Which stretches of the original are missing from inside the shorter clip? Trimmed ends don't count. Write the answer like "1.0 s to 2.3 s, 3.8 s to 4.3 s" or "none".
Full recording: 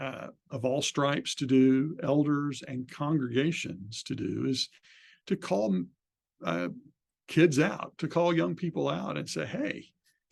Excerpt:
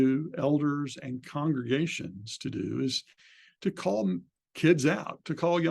6.0 s to 7.1 s

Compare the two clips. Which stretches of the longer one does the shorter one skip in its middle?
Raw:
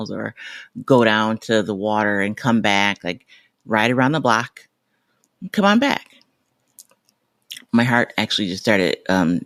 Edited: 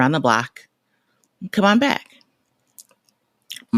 none

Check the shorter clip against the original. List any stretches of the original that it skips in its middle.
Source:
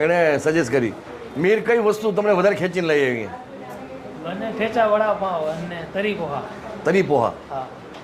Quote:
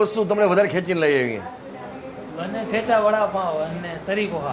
none

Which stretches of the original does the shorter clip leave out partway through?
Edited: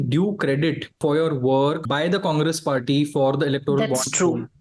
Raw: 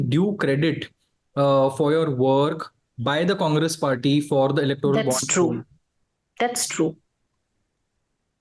1.0 s to 1.7 s, 2.6 s to 3.0 s

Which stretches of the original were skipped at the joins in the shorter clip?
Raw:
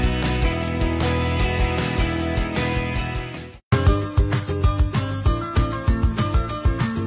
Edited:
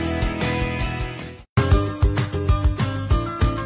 none

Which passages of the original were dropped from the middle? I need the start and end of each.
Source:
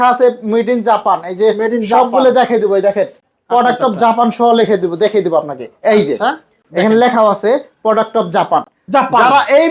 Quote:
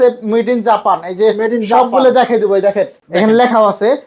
3.2 s to 6.6 s

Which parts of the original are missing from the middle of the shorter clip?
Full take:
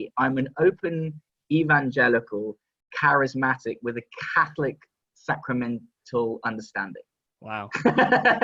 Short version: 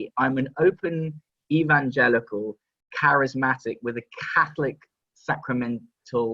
none

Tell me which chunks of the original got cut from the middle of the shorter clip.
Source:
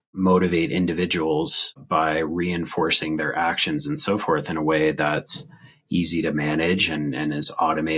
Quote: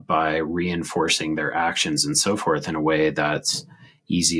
none

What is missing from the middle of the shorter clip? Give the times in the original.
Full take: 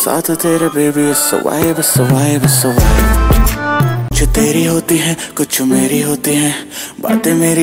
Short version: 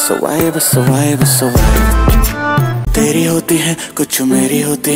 4.1 s to 4.3 s

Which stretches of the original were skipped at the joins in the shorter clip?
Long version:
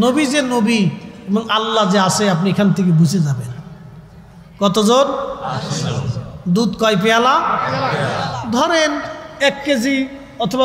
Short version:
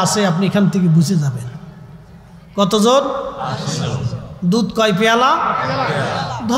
none

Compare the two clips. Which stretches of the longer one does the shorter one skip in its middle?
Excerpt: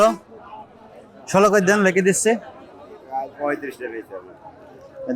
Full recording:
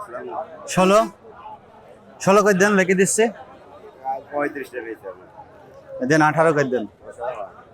none

